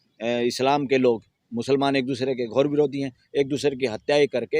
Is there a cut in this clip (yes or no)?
yes